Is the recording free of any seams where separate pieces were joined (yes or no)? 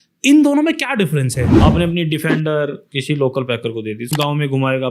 no